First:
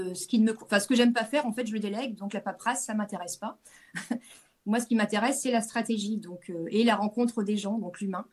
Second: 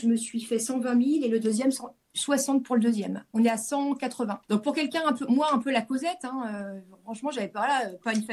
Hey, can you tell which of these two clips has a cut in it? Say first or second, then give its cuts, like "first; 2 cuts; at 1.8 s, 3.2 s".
second; 2 cuts; at 3.2 s, 4.4 s